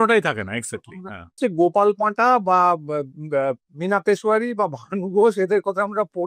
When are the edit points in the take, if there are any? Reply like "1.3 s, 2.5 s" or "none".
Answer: 1.4 s